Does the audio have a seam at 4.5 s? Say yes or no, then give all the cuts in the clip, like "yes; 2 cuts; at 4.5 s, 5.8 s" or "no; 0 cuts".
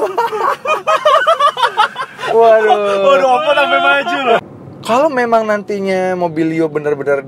yes; 1 cut; at 4.5 s